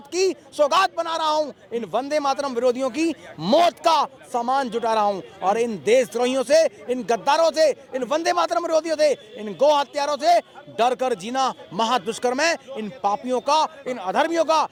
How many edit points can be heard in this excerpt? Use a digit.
0